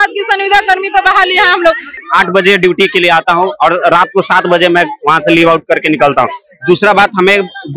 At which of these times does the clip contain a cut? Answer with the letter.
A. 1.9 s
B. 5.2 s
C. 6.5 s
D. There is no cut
A